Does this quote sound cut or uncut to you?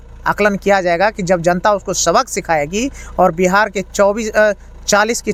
uncut